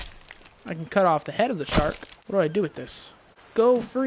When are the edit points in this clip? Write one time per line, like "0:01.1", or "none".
0:02.1